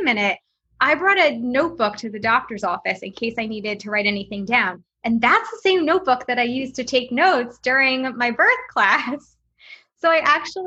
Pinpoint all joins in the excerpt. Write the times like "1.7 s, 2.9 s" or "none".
none